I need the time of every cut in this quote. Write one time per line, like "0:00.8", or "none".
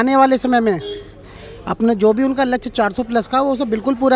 none